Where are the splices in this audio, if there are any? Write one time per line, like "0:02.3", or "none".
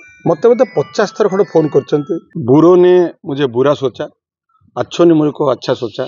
0:02.2